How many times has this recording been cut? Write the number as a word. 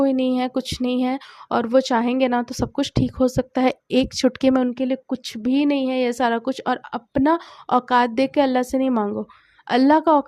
zero